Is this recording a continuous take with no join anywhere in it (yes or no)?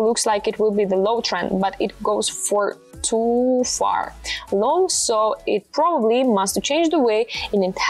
yes